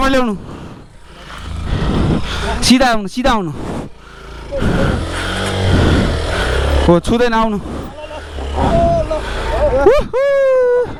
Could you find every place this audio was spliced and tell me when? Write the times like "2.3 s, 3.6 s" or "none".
none